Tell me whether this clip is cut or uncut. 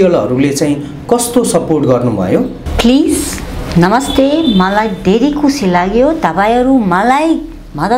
cut